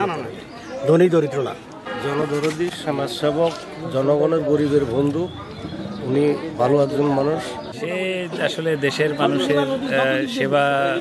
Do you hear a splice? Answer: yes; 2 cuts; at 1.9 s, 7.8 s

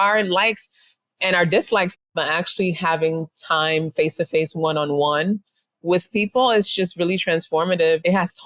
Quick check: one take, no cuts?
no; 1 cut; at 2.1 s

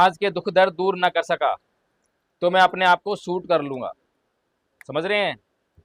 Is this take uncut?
yes; 0 cuts

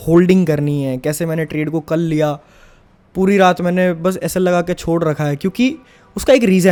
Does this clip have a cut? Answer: no; 0 cuts

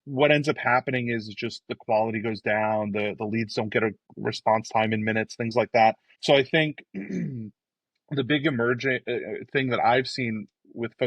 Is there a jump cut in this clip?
yes; 2 cuts; at 4.1 s, 6.1 s

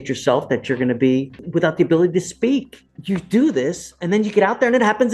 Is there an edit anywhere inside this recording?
yes; 2 cuts; at 1.4 s, 2.9 s

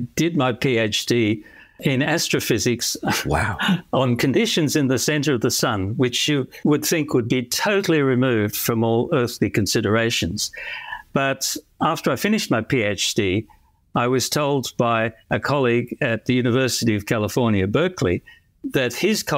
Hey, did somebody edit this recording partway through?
no; 0 cuts

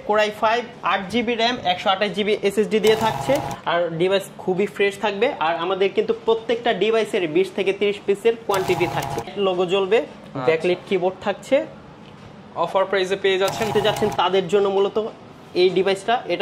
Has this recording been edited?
yes; 3 cuts; at 3.5 s, 9.3 s, 13.7 s

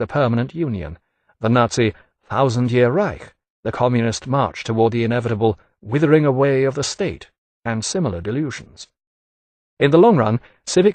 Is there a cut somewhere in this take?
yes; 1 cut; at 6.1 s

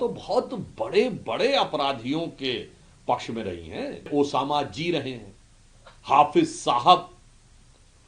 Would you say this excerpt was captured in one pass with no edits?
no; 1 cut; at 4.1 s

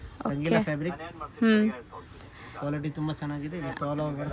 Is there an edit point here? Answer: no; 0 cuts

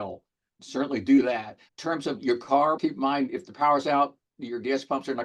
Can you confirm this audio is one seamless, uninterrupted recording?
yes; 0 cuts

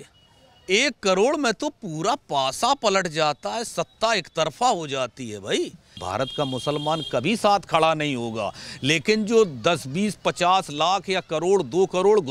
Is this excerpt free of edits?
no; 1 cut; at 6.0 s

